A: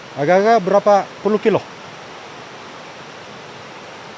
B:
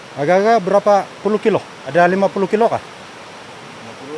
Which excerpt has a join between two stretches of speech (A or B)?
B